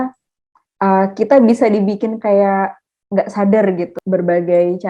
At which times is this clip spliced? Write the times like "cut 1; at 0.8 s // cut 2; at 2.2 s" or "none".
cut 1; at 3.9 s